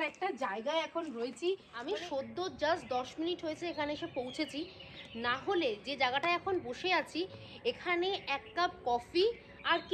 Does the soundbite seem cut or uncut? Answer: cut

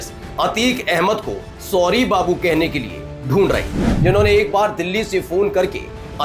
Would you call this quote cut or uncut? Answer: cut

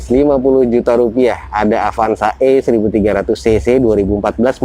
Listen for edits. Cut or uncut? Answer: uncut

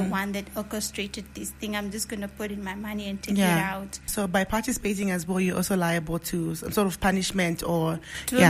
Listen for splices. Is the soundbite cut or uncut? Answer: cut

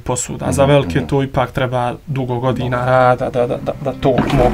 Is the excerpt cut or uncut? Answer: uncut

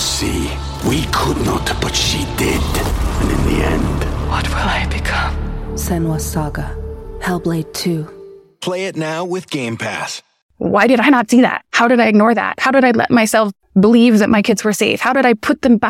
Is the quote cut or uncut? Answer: cut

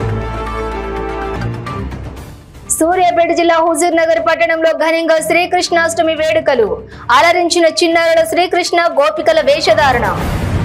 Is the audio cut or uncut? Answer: cut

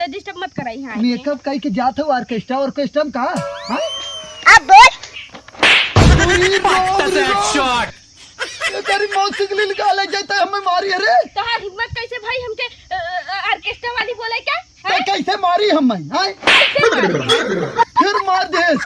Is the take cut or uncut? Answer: uncut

